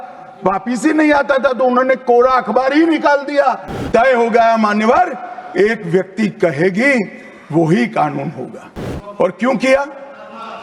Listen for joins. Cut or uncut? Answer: cut